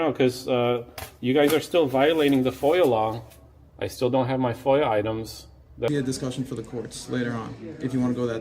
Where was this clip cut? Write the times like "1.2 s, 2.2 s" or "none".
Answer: 5.9 s